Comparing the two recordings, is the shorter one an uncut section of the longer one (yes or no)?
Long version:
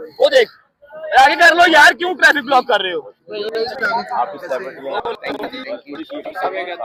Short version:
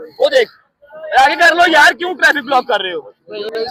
yes